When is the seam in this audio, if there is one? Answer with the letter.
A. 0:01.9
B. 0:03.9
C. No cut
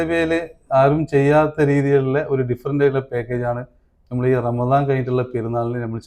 C